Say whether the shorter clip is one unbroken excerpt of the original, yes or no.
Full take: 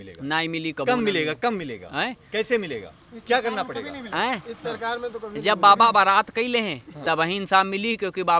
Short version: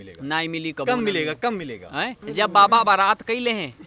no